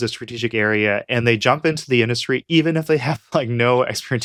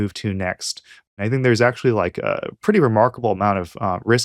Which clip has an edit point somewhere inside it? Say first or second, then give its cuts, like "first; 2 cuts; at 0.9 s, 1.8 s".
second; 1 cut; at 1.1 s